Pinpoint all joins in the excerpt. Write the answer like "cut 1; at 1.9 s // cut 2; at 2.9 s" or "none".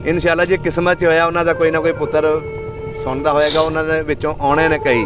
none